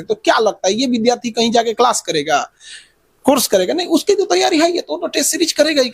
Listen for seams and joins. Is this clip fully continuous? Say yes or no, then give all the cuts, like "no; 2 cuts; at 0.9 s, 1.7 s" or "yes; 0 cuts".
yes; 0 cuts